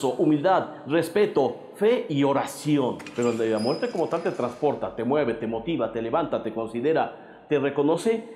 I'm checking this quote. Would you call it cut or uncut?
cut